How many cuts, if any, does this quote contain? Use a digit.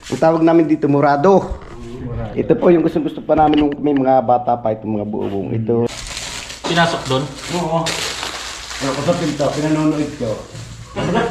1